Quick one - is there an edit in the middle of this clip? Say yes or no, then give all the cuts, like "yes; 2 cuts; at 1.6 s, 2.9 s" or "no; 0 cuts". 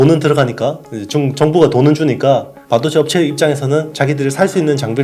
no; 0 cuts